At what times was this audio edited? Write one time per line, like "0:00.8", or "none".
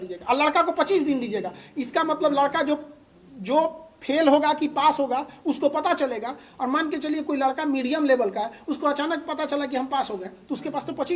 none